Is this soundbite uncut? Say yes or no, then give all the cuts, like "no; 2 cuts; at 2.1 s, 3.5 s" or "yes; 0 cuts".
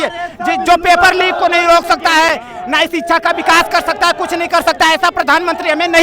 yes; 0 cuts